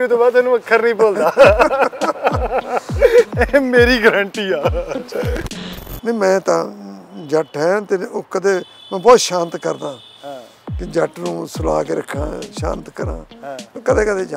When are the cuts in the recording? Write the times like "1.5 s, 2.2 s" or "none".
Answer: 3.4 s, 5.4 s